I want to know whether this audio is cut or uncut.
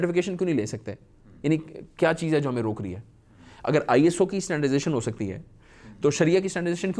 uncut